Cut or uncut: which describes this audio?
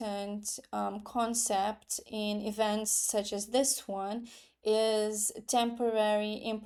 uncut